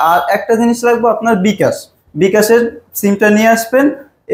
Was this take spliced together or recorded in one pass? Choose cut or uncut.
uncut